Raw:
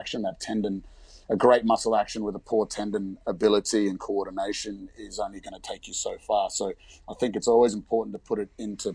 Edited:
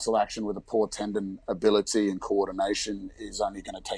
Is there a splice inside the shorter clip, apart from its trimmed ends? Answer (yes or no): no